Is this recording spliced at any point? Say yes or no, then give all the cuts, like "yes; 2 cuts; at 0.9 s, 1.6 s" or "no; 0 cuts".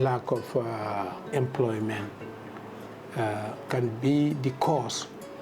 yes; 2 cuts; at 1.3 s, 3.6 s